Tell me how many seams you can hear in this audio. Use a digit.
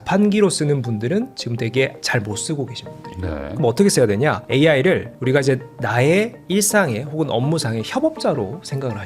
0